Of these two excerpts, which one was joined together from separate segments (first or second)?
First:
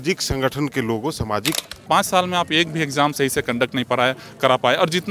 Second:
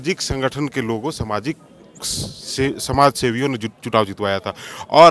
first